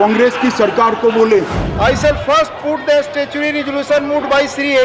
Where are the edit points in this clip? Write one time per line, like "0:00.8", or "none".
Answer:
0:01.6